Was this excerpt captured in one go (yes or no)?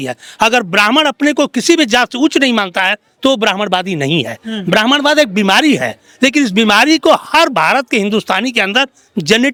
yes